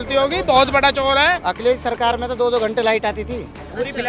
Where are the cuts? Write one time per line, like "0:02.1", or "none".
0:01.5

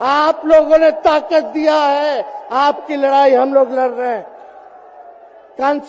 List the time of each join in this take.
none

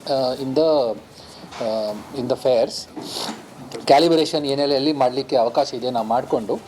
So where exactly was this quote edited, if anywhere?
none

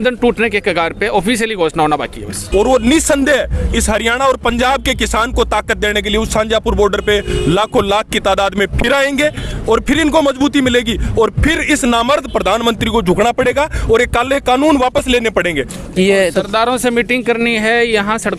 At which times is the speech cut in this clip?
0:02.4
0:15.7

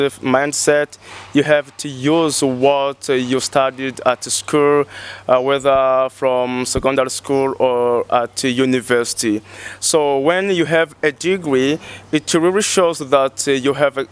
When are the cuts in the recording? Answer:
none

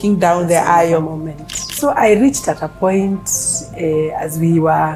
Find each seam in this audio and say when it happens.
0:01.6

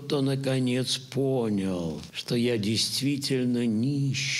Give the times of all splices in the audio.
0:02.1

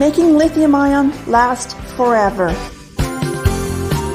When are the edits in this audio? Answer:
0:01.6
0:02.8

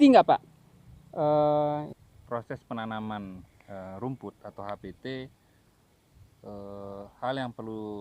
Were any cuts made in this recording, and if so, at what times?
0:01.8

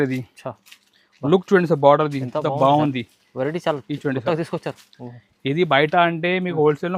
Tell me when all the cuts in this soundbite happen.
none

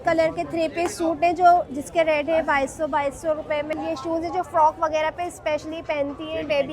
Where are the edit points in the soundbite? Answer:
0:03.7

